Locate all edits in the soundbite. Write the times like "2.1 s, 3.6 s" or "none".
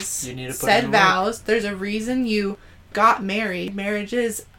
3.7 s